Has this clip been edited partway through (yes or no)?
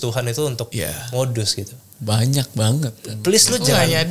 no